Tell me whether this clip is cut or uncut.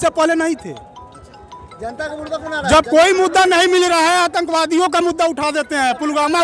uncut